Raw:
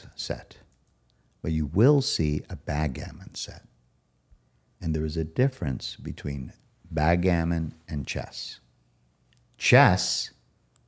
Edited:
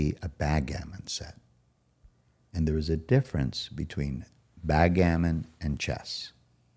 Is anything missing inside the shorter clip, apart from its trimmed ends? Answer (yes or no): no